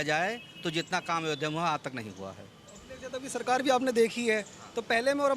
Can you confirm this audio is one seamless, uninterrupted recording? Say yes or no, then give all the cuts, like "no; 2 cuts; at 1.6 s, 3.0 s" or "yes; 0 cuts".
yes; 0 cuts